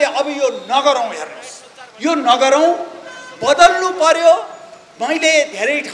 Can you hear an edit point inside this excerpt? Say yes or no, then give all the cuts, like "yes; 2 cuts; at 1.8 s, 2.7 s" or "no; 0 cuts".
no; 0 cuts